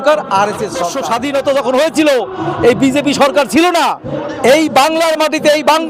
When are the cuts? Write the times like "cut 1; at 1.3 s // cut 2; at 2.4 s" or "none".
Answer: cut 1; at 0.9 s // cut 2; at 4.1 s